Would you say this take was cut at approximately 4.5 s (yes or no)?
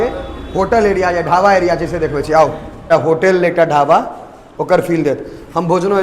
no